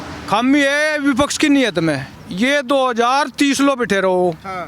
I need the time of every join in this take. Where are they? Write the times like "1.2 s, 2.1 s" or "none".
2.2 s